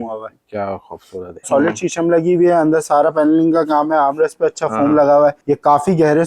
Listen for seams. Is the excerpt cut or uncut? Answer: cut